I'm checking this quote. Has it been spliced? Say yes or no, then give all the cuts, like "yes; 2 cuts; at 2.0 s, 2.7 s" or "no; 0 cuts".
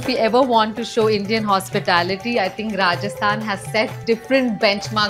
no; 0 cuts